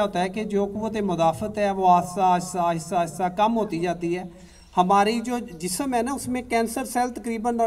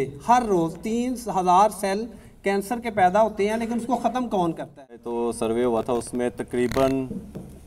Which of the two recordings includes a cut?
second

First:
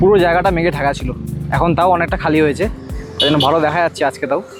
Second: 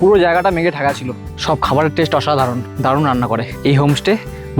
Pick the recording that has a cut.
second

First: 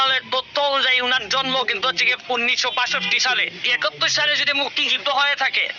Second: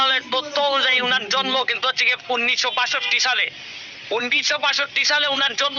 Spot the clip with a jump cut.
first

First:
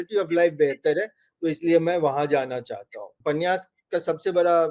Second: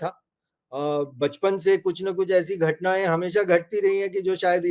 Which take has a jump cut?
first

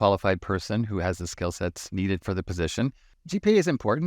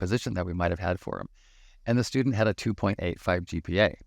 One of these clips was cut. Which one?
first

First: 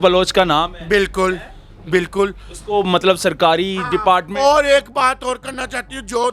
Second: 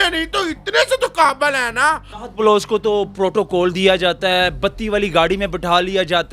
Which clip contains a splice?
second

